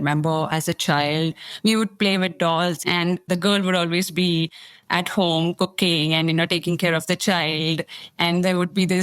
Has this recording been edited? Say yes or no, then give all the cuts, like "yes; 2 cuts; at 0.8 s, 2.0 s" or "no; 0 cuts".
yes; 1 cut; at 2.8 s